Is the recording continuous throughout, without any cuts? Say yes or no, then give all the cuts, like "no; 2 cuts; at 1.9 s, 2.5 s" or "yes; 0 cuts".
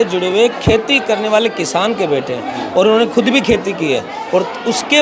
yes; 0 cuts